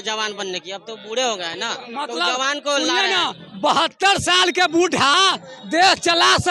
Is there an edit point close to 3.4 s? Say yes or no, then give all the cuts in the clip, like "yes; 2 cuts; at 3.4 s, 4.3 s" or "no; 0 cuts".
no; 0 cuts